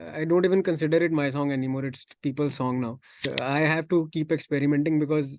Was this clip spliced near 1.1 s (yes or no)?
no